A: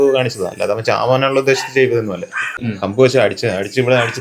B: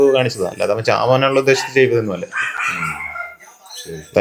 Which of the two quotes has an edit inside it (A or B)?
A